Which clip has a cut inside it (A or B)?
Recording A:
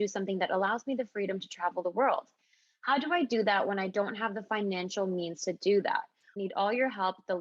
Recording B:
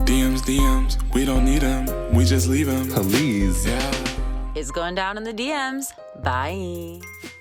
A